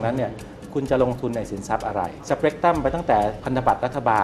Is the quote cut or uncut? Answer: cut